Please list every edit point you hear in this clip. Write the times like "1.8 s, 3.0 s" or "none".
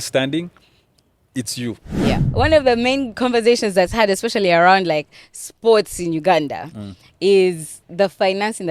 2.3 s